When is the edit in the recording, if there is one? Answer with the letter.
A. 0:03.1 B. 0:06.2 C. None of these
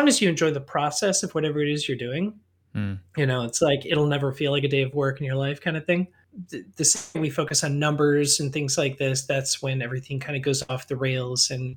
B